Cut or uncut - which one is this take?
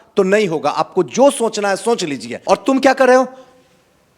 cut